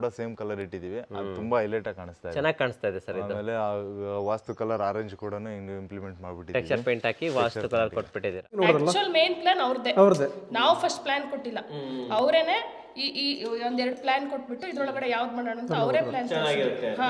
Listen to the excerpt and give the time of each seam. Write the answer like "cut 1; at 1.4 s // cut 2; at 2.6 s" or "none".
cut 1; at 8.6 s